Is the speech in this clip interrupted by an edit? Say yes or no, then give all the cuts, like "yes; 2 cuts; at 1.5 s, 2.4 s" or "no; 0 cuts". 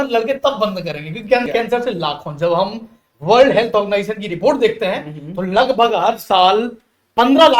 yes; 1 cut; at 1.5 s